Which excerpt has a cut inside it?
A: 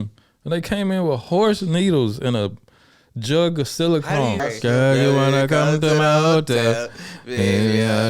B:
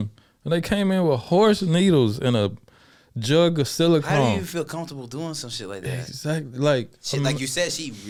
A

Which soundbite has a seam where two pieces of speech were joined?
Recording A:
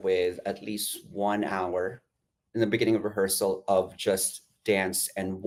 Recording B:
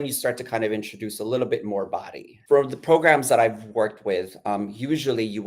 B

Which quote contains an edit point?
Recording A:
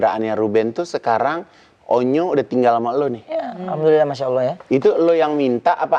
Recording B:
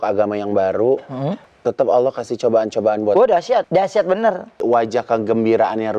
B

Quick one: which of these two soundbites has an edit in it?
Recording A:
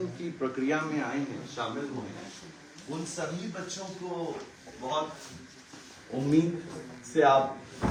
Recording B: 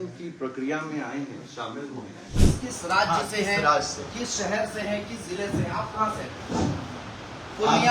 B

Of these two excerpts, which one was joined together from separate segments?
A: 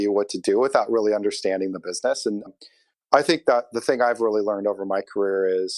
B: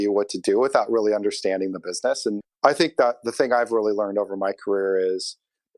B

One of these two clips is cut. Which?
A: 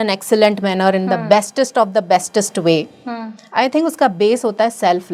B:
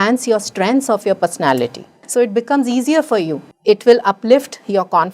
B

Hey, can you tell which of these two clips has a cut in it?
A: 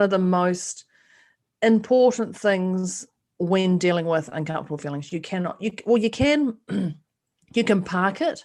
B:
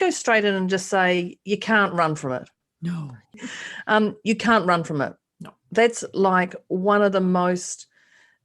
B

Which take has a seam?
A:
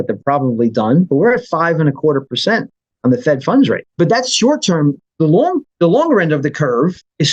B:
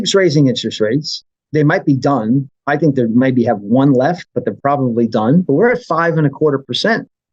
A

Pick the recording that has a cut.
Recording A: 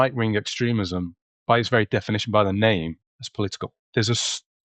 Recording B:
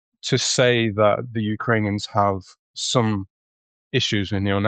A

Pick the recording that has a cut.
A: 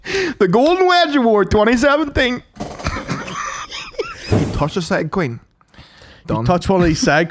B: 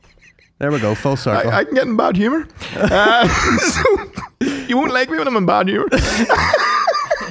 A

